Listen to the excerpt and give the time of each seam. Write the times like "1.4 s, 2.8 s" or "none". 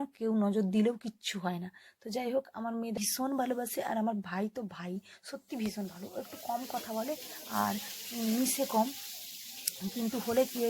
2.9 s